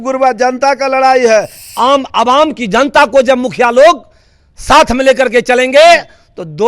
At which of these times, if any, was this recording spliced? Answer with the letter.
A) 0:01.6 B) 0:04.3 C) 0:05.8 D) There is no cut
A